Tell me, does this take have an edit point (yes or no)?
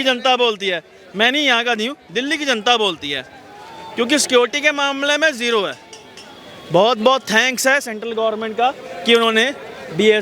no